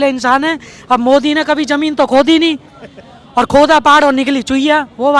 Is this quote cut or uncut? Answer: uncut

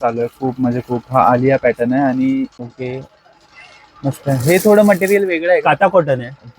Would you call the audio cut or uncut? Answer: cut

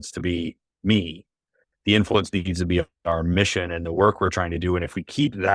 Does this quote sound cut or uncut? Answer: uncut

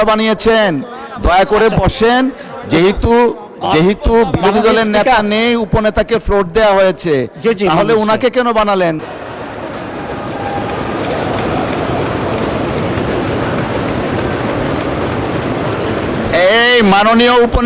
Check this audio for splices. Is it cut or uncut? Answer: cut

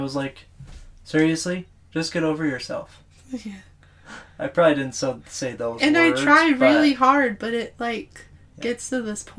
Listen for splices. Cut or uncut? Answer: uncut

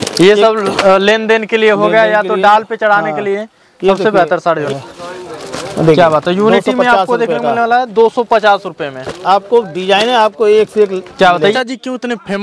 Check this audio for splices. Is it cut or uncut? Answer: cut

